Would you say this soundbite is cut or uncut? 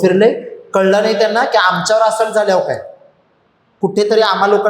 cut